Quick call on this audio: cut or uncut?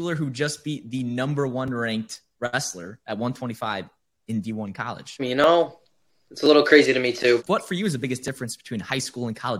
cut